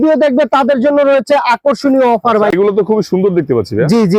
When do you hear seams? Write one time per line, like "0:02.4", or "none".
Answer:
0:02.5